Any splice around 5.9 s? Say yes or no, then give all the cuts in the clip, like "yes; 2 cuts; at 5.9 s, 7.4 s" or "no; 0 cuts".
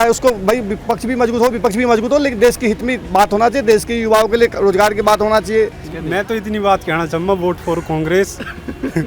yes; 1 cut; at 5.9 s